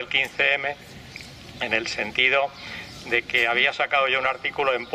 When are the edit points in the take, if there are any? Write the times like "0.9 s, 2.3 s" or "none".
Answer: 1.0 s